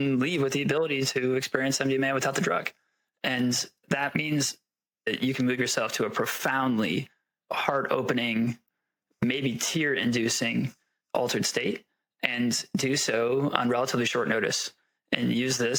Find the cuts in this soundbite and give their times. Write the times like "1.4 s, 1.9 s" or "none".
none

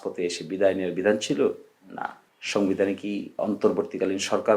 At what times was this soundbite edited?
3.3 s

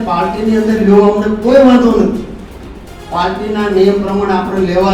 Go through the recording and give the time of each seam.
none

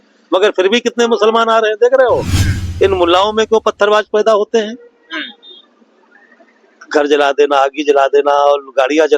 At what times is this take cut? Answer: 2.6 s

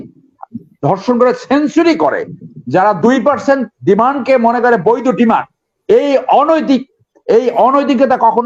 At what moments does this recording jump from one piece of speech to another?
none

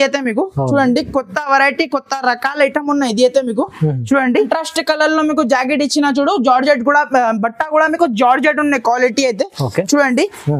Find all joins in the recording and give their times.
4.4 s

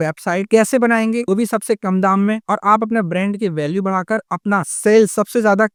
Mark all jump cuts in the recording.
none

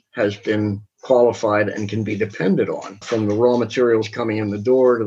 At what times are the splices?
2.9 s

